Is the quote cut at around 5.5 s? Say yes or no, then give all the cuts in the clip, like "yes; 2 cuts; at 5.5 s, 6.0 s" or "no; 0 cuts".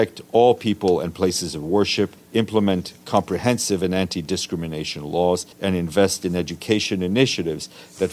yes; 2 cuts; at 2.2 s, 5.5 s